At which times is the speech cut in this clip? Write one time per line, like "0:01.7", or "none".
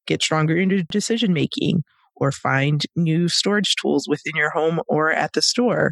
0:00.9